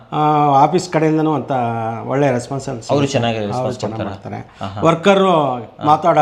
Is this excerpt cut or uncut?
uncut